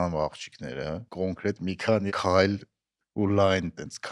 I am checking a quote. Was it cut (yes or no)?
yes